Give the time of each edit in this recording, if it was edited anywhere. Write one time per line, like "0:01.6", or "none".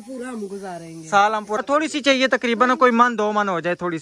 0:01.6

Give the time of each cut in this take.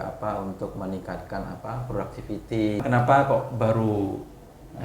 0:02.8

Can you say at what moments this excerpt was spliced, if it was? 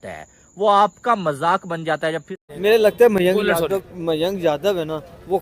0:02.4

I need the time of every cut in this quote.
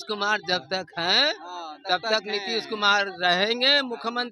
none

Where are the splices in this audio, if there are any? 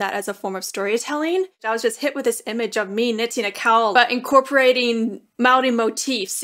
0:01.6
0:03.9

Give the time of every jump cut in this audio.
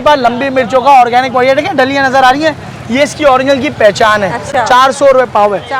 none

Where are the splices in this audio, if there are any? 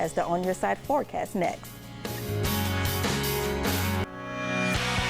0:04.1

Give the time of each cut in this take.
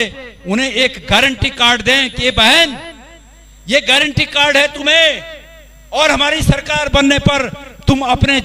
none

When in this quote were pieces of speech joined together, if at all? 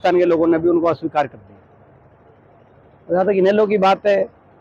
none

